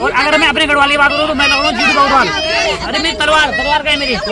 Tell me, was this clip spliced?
no; 0 cuts

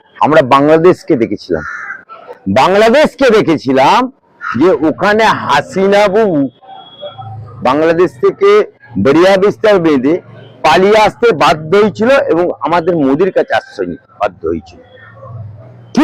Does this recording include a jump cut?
no; 0 cuts

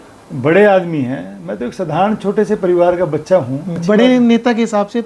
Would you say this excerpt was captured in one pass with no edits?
no; 1 cut; at 3.8 s

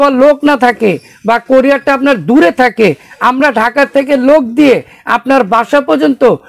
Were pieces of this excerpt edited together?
no; 0 cuts

